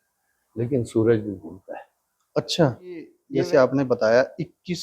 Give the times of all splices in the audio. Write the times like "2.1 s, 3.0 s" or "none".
3.2 s